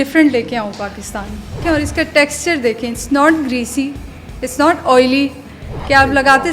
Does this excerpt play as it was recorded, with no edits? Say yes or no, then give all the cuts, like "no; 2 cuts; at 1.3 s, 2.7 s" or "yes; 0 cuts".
no; 1 cut; at 1.6 s